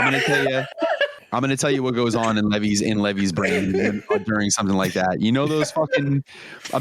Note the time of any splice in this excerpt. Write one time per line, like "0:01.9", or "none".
0:01.2